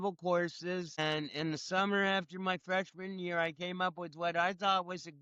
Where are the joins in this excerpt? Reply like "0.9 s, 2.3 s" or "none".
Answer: 1.0 s